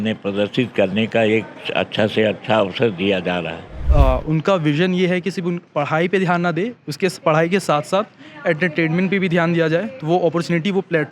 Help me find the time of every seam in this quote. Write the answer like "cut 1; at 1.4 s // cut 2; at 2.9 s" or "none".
cut 1; at 3.8 s